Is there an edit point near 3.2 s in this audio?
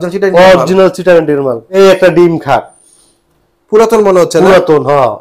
no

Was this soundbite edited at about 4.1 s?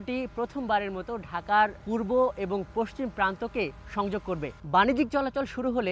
yes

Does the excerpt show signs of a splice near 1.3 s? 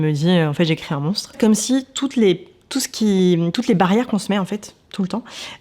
yes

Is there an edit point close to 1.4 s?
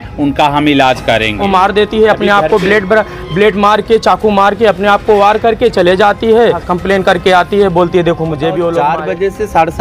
yes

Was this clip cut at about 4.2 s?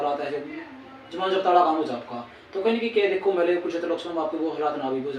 no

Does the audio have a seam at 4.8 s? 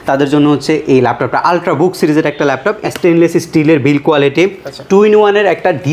no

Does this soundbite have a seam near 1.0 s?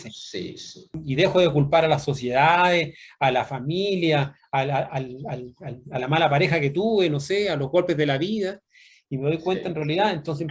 yes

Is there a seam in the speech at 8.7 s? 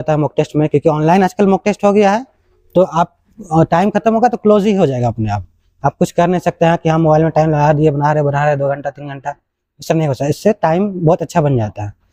no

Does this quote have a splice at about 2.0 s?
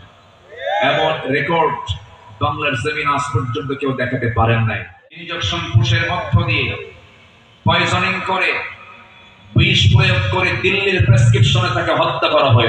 no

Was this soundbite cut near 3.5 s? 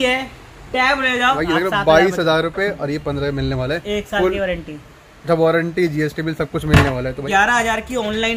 no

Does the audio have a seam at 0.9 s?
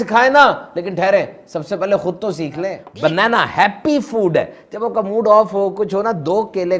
no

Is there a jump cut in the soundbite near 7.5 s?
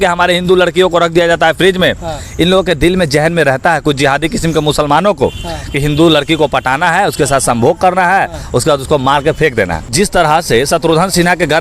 no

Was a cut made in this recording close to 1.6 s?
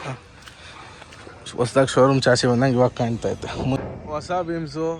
no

